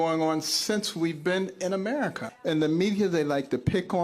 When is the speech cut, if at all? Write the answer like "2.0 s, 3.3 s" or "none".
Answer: 2.3 s